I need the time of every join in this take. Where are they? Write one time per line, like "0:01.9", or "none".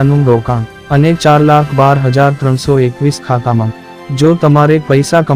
none